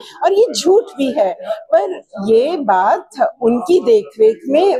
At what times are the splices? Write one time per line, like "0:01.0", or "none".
none

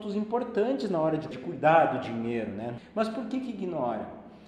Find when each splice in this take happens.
0:01.3
0:02.8

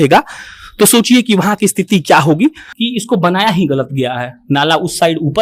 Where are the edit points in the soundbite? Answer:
0:02.7

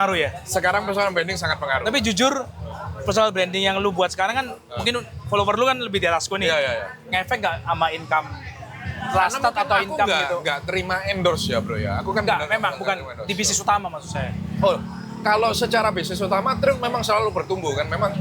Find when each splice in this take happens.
none

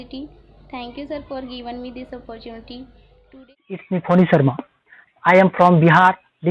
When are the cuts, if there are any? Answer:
0:03.5

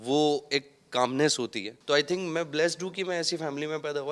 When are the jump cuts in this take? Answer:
0:01.7

